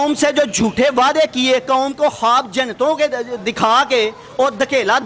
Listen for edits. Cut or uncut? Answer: uncut